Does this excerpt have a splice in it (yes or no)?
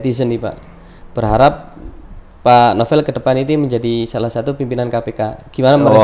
no